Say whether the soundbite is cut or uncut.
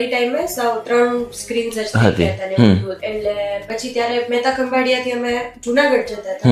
cut